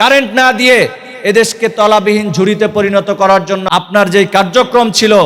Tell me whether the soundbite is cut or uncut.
cut